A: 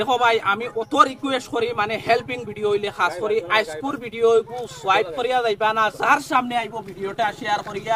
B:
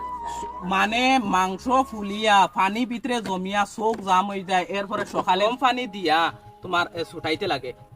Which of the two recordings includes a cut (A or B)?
B